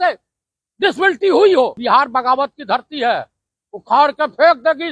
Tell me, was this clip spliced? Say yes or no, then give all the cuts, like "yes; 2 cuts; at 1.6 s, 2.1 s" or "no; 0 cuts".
yes; 1 cut; at 1.8 s